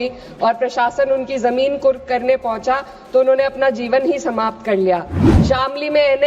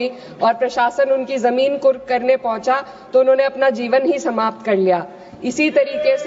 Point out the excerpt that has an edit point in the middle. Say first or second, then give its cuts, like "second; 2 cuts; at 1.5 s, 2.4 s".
first; 1 cut; at 5.3 s